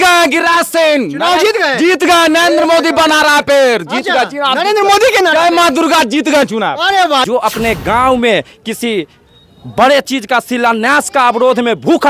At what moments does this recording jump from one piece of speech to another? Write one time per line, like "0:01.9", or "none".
0:07.2